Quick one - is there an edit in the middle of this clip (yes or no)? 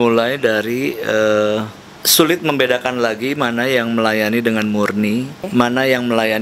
yes